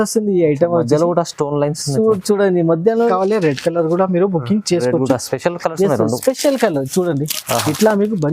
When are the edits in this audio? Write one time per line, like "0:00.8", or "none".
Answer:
0:03.0